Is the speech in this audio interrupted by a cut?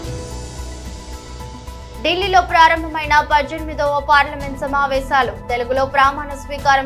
no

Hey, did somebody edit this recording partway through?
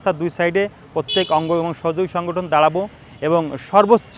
no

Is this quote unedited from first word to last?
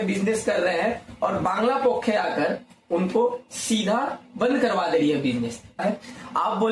no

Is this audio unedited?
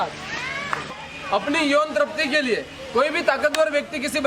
no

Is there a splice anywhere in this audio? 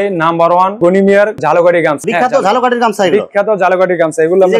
no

